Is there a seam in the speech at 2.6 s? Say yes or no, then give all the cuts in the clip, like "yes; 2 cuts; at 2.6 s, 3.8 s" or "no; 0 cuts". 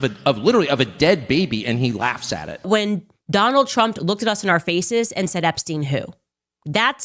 yes; 1 cut; at 2.6 s